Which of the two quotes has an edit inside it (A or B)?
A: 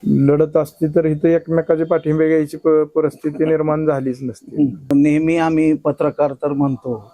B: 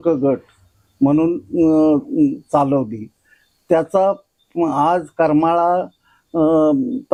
A